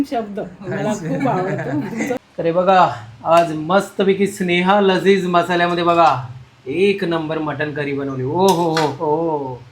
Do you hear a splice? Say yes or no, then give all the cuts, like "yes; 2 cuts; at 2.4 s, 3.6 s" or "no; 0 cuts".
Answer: yes; 1 cut; at 2.2 s